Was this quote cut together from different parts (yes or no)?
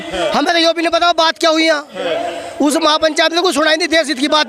no